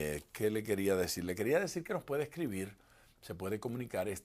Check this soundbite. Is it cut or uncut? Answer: cut